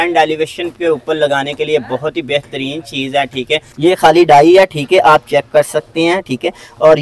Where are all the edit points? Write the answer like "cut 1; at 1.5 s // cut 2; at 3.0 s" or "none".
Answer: cut 1; at 3.7 s

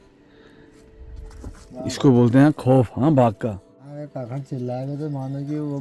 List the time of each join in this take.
cut 1; at 3.9 s

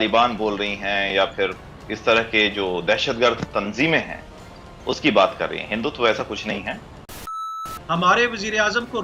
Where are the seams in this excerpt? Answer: cut 1; at 7.4 s

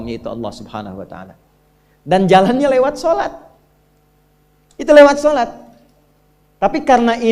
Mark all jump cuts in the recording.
none

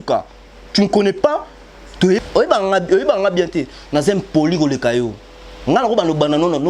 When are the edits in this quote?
cut 1; at 2.2 s

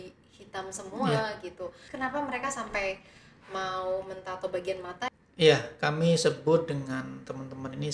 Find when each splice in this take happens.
cut 1; at 1.9 s // cut 2; at 5.1 s

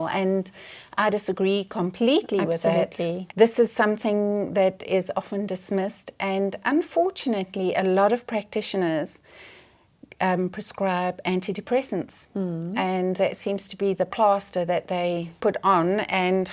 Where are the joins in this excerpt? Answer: cut 1; at 3.2 s

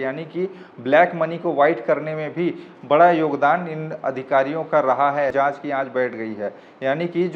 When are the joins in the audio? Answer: cut 1; at 5.3 s

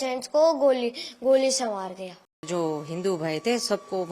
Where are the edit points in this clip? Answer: cut 1; at 2.4 s

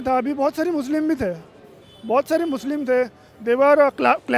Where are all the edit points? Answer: none

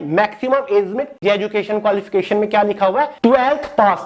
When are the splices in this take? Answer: cut 1; at 1.2 s // cut 2; at 3.1 s

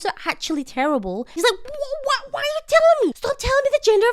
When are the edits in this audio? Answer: cut 1; at 1.4 s // cut 2; at 3.2 s

